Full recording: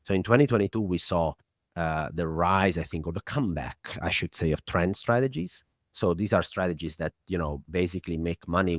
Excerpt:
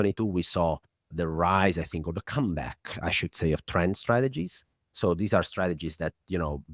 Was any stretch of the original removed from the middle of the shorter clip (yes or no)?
yes